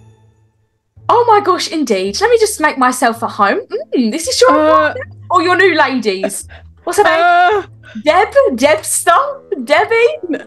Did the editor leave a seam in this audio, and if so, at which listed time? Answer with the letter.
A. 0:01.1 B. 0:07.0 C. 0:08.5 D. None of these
A